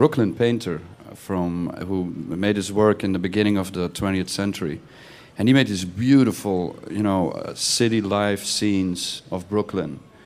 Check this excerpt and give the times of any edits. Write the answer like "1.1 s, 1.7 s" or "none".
none